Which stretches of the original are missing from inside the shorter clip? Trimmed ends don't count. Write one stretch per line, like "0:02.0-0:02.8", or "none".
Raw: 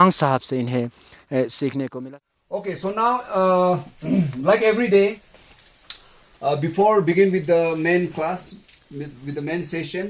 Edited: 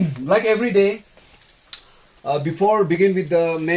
none